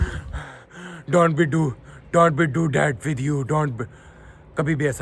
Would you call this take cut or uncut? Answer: uncut